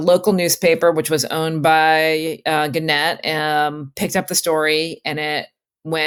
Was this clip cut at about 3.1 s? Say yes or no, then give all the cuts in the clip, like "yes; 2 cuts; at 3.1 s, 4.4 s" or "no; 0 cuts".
no; 0 cuts